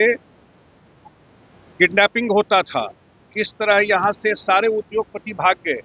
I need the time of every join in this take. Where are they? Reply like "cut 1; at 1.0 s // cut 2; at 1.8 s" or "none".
none

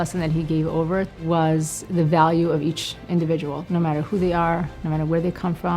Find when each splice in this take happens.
cut 1; at 1.2 s // cut 2; at 1.8 s // cut 3; at 3.6 s

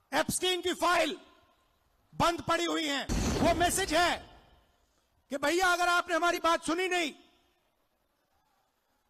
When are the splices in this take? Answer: cut 1; at 3.2 s

